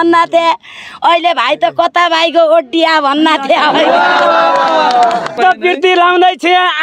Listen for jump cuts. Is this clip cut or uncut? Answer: uncut